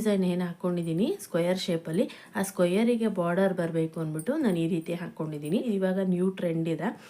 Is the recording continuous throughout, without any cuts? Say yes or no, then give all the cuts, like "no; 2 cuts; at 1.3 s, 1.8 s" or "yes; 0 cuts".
no; 1 cut; at 5.6 s